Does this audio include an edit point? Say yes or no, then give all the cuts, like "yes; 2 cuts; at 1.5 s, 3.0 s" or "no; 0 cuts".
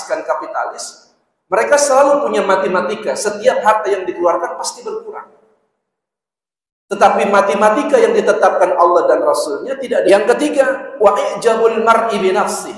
yes; 1 cut; at 10.1 s